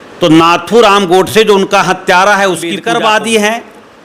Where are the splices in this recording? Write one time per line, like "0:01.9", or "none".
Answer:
0:02.7